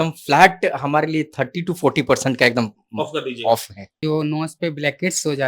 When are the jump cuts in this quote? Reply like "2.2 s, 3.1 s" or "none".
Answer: 4.0 s